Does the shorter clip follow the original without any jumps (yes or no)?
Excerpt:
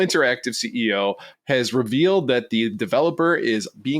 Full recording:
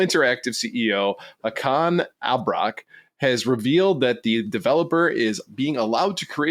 no